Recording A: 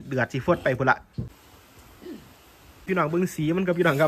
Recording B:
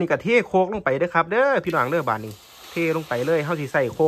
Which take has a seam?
A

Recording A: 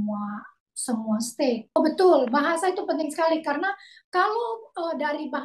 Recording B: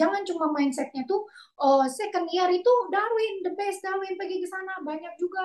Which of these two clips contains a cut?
A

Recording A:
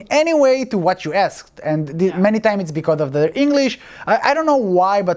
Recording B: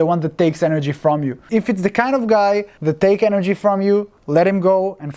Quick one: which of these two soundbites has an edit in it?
B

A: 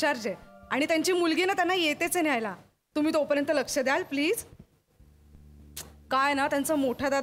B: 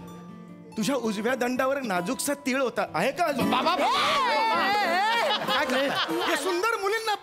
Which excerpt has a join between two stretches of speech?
B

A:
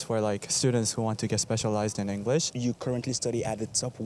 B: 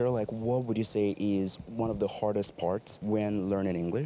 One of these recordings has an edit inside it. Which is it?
A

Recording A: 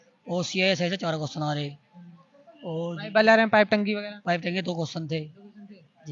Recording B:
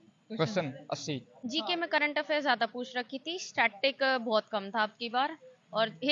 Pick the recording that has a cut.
B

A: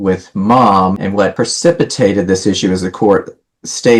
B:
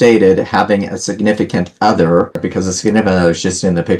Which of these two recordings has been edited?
B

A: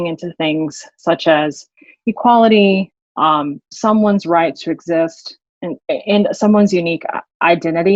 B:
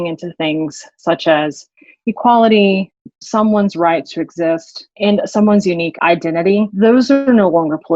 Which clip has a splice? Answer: B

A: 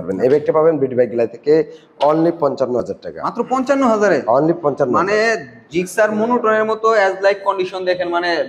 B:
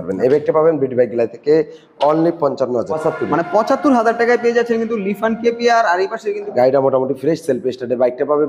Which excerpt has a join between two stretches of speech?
B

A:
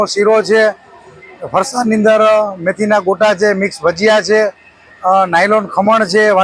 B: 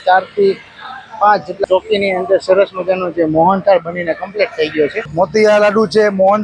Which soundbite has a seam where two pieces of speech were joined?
B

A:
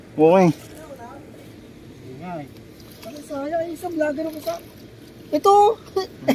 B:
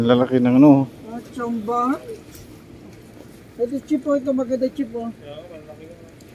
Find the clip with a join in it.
A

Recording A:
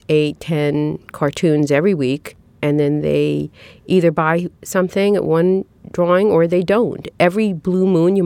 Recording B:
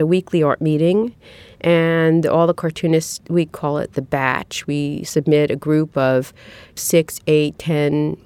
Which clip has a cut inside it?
A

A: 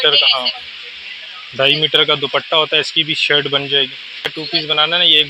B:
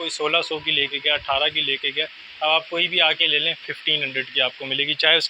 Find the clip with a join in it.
A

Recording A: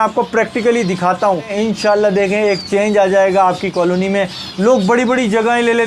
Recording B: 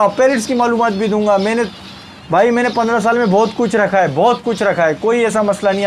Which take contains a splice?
A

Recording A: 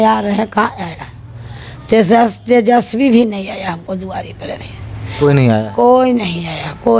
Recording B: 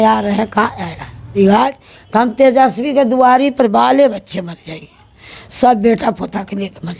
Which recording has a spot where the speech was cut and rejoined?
B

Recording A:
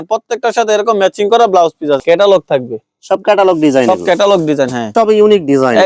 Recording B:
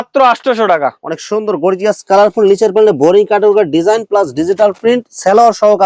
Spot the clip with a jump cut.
A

